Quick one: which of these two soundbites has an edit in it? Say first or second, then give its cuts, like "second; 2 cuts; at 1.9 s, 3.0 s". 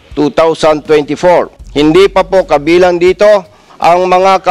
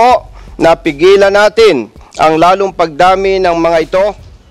first; 1 cut; at 1.6 s